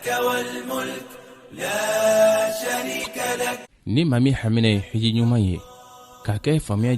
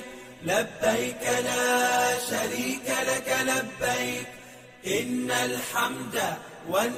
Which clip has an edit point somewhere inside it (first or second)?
first